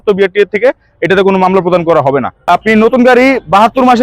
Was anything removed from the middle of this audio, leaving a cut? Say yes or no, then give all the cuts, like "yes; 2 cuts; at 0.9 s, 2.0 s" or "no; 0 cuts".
yes; 1 cut; at 2.3 s